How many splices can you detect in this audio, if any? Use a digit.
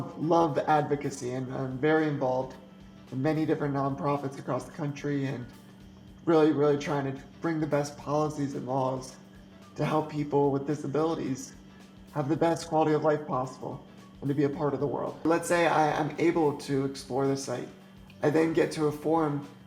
1